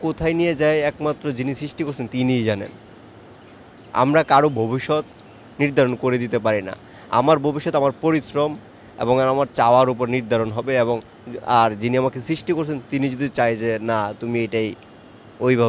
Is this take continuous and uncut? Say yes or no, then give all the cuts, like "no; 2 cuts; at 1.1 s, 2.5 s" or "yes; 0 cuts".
yes; 0 cuts